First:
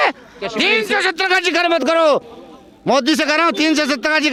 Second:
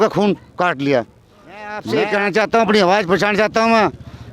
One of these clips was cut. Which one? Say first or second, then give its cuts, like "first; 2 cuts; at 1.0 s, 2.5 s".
second; 1 cut; at 1.8 s